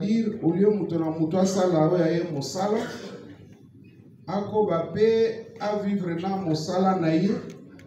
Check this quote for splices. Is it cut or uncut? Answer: uncut